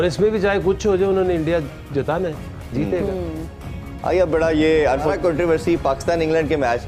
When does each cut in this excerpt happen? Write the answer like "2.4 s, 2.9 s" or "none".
none